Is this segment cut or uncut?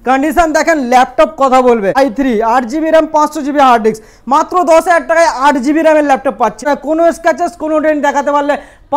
cut